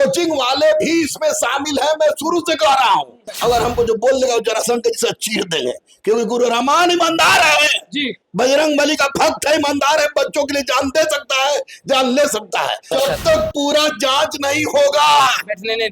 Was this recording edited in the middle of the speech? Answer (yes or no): yes